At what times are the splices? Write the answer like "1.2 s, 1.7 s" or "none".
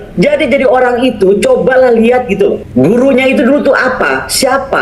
2.6 s